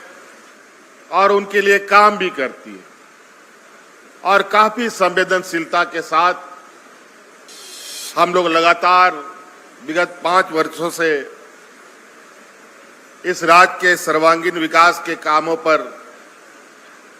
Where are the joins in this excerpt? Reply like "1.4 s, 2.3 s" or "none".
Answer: 7.5 s